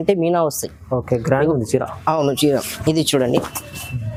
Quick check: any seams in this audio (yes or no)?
no